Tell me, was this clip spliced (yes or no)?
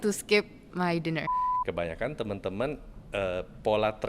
yes